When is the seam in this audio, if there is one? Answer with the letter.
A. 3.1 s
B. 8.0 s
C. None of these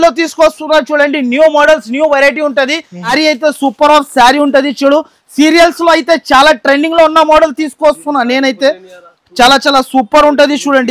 A